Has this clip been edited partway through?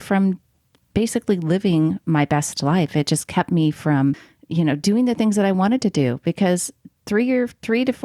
yes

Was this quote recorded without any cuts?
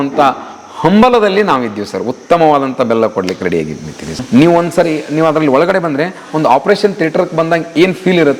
no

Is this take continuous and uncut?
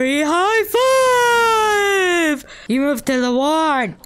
no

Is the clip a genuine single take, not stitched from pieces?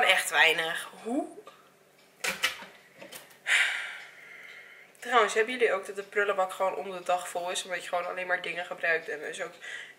yes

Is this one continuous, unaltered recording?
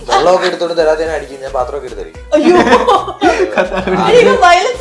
yes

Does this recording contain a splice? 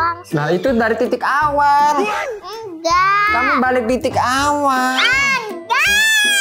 no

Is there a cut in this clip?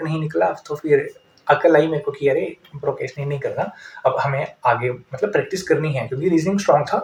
no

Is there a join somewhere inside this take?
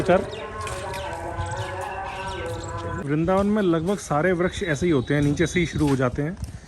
yes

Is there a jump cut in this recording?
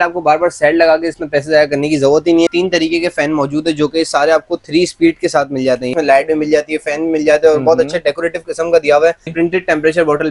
yes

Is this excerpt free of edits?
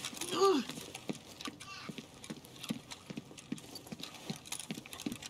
yes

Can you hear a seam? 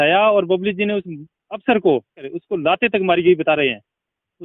yes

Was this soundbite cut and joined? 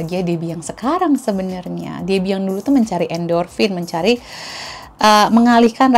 no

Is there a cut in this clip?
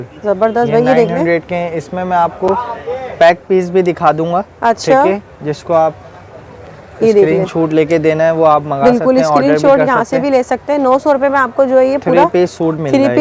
no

